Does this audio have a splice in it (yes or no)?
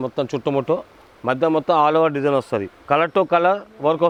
no